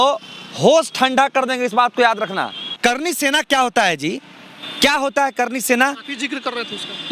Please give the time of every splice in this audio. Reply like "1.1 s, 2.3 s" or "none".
2.8 s